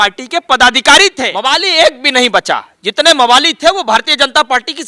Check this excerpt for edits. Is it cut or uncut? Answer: cut